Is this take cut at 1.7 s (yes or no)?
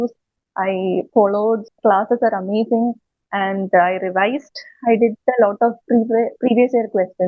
yes